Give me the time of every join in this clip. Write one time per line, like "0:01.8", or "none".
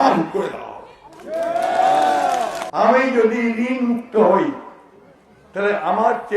0:02.6